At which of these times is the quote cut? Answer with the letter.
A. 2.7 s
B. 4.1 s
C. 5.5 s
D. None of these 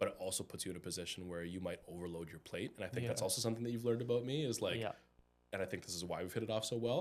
D